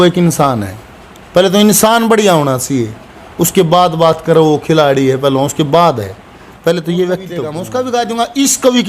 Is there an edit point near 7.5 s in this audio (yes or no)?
yes